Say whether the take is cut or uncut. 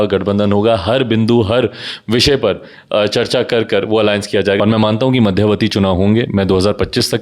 cut